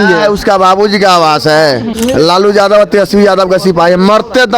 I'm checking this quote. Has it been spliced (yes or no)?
yes